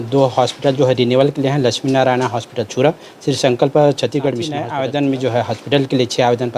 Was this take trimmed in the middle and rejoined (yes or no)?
yes